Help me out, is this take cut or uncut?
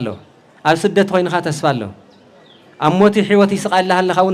uncut